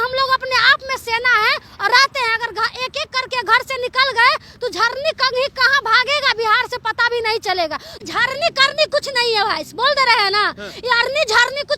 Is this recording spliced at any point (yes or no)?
yes